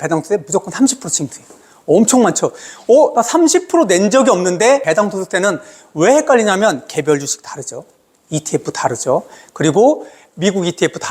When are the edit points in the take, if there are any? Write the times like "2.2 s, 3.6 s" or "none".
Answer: 4.8 s